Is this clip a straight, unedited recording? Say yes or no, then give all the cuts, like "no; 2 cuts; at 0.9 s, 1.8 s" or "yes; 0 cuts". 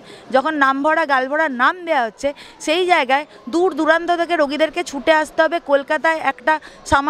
yes; 0 cuts